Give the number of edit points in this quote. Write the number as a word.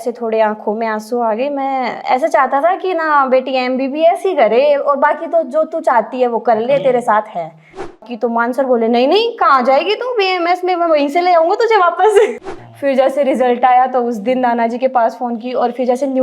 two